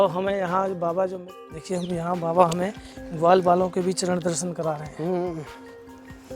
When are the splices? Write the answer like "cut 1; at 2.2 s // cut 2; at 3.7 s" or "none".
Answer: cut 1; at 1.2 s // cut 2; at 5.5 s